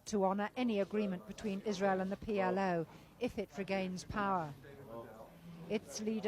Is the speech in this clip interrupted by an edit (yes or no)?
no